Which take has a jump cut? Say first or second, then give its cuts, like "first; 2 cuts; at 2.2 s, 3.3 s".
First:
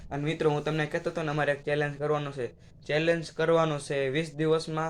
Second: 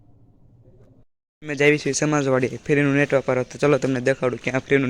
second; 1 cut; at 1.2 s